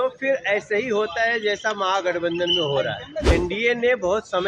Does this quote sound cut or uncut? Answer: cut